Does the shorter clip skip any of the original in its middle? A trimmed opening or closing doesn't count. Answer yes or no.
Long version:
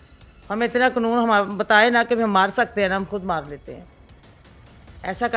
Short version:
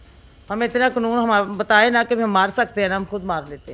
no